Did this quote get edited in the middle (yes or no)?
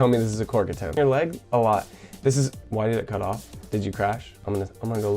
yes